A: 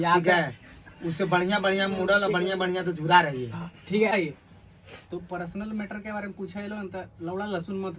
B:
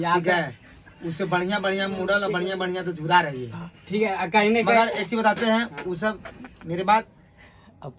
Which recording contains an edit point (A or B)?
A